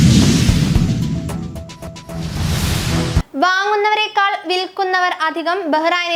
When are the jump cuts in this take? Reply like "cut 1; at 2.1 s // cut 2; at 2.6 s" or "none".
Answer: cut 1; at 2.1 s